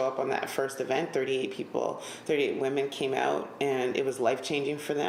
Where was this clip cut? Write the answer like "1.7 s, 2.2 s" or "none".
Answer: none